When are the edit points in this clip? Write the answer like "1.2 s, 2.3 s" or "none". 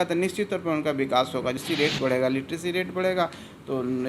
1.6 s

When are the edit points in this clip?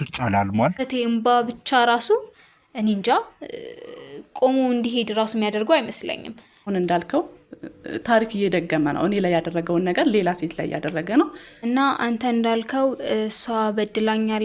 0.8 s, 6.7 s, 11.5 s

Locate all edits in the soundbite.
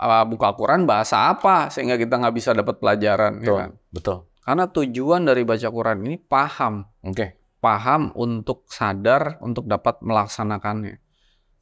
4.3 s

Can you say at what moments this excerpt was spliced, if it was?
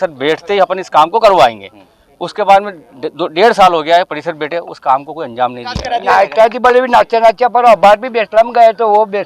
5.9 s

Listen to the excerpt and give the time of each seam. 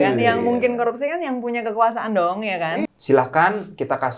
2.9 s

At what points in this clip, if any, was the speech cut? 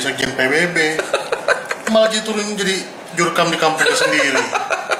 none

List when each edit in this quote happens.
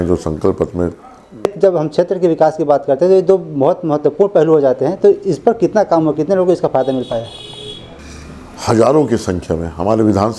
1.5 s

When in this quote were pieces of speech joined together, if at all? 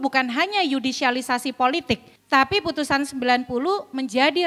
2.1 s

